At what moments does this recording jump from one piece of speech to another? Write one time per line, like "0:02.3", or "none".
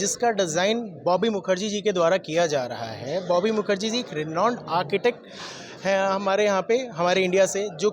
none